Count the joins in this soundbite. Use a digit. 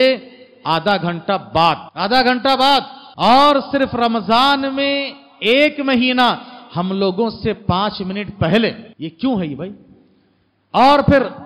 3